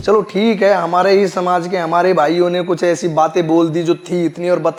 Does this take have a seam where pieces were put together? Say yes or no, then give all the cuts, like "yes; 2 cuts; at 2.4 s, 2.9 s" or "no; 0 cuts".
no; 0 cuts